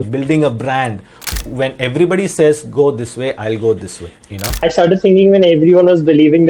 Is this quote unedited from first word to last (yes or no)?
no